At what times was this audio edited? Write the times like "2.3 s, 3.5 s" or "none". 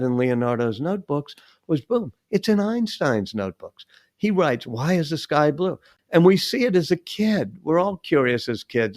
5.9 s